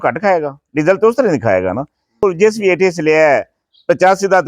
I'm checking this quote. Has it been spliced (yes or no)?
yes